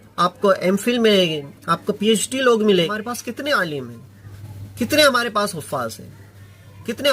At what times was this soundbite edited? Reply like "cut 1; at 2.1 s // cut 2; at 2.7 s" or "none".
cut 1; at 2.9 s

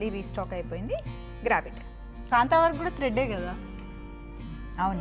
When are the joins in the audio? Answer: cut 1; at 2.3 s

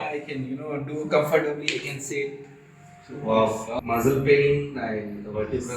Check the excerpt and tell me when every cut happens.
cut 1; at 3.7 s

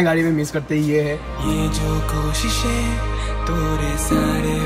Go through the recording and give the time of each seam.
cut 1; at 1.3 s

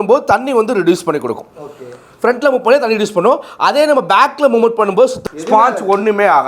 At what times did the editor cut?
cut 1; at 5.2 s

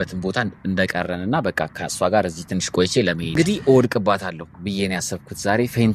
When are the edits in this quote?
cut 1; at 3.4 s

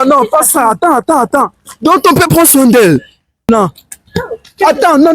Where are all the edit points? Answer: cut 1; at 3.5 s

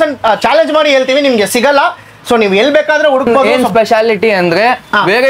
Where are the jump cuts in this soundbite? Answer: cut 1; at 3.4 s

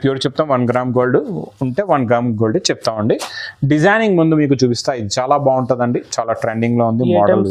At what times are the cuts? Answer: none

